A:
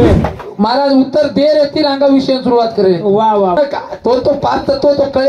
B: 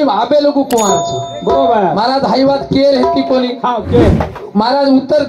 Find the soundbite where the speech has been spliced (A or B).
A